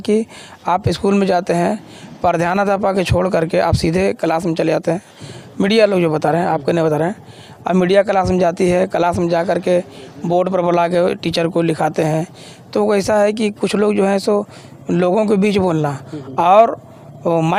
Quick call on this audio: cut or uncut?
uncut